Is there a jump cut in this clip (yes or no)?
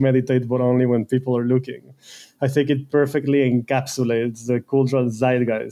no